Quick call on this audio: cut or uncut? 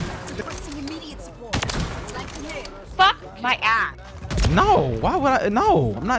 uncut